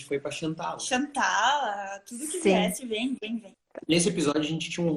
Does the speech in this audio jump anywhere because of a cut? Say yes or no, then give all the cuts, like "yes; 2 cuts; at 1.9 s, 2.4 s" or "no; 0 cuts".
yes; 1 cut; at 3.6 s